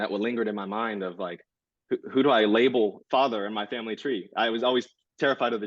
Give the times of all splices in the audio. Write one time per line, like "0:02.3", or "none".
none